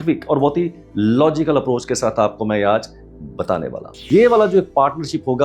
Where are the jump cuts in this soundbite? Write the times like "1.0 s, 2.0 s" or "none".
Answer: 3.9 s